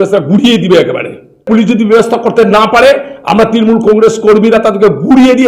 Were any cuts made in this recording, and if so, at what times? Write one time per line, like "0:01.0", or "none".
0:01.4

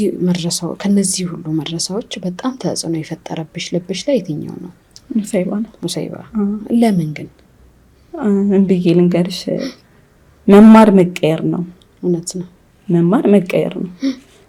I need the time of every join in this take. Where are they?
none

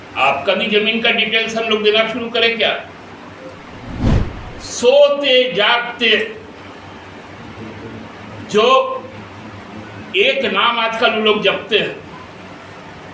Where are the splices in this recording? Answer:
0:04.1

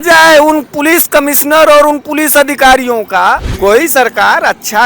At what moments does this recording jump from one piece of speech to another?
0:03.5

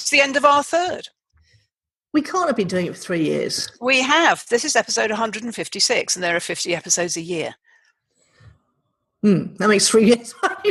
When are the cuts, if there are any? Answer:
none

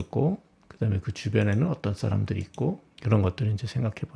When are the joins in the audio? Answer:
0:02.9

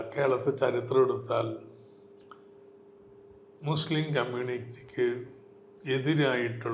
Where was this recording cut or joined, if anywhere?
none

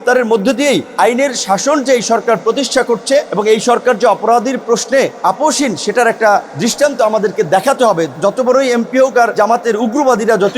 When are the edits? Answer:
0:00.9
0:03.3
0:05.1
0:06.5
0:08.2
0:09.3

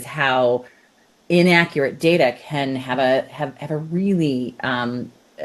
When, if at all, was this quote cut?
none

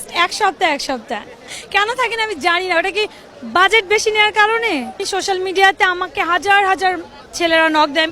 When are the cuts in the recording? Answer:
0:01.4
0:05.0

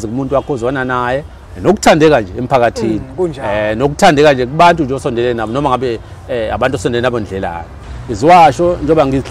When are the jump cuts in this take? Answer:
0:07.8

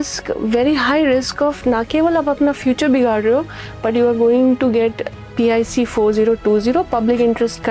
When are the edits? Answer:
none

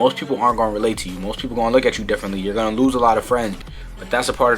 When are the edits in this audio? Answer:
0:03.6

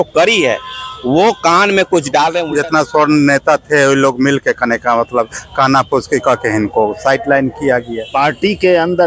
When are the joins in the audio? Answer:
0:02.4
0:08.0

